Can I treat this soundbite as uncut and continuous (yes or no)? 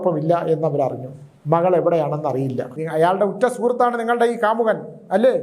no